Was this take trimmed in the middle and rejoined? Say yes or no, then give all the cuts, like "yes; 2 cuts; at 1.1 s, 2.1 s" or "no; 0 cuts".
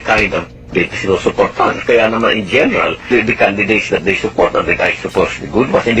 yes; 1 cut; at 3.1 s